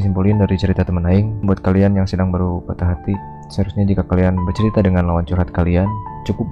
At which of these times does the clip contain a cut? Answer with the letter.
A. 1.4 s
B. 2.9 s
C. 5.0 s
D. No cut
A